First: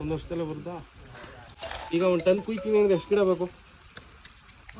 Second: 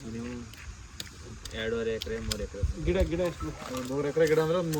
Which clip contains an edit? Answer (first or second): first